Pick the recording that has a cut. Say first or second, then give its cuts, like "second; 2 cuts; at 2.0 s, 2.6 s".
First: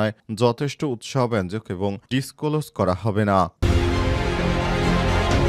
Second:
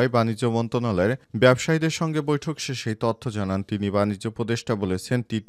first; 2 cuts; at 2.0 s, 3.6 s